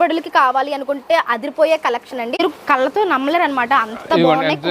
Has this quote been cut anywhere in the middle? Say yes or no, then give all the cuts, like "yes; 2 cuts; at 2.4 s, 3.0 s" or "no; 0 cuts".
yes; 1 cut; at 2.4 s